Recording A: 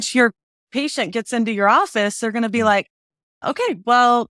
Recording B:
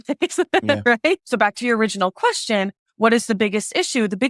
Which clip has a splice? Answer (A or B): B